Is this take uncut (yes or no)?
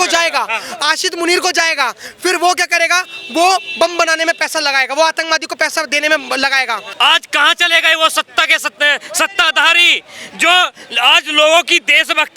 no